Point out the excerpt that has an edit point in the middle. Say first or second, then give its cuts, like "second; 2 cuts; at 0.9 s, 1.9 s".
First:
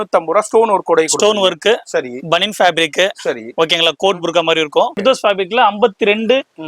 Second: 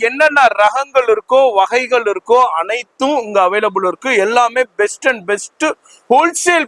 first; 1 cut; at 4.9 s